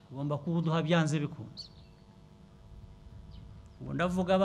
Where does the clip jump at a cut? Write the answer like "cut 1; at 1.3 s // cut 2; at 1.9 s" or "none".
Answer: none